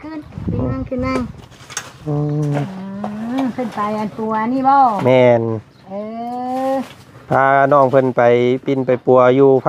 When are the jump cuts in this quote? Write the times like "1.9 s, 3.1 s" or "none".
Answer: none